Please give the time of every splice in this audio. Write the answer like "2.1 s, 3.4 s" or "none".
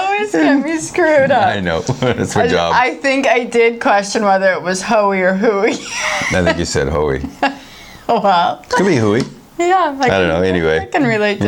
none